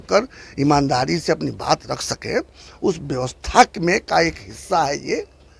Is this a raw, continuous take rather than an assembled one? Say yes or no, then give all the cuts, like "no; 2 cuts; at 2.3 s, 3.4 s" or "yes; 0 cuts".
yes; 0 cuts